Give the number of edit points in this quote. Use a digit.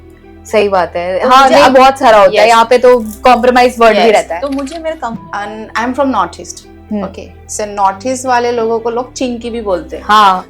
1